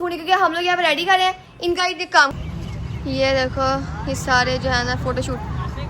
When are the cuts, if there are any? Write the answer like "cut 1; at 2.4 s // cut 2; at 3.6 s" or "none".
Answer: cut 1; at 2.3 s